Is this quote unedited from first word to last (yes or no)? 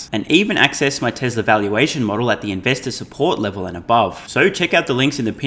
yes